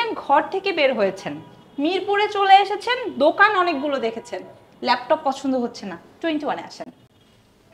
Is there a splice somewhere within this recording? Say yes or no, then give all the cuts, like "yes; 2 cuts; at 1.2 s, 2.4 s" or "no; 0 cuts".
no; 0 cuts